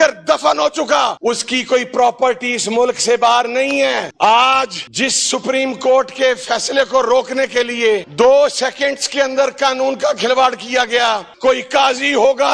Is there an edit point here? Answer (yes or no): yes